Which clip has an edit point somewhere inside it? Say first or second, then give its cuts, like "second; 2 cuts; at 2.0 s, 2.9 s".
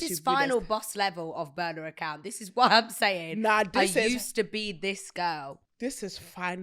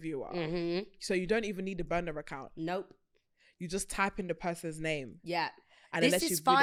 first; 1 cut; at 5.6 s